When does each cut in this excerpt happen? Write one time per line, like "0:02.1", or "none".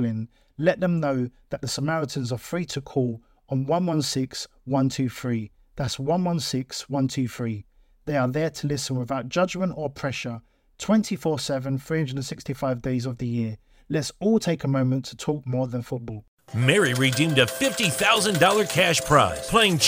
0:16.3